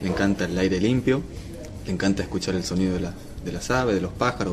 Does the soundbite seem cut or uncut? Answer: uncut